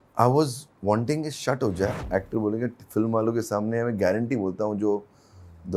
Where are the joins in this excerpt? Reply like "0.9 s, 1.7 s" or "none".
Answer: 1.9 s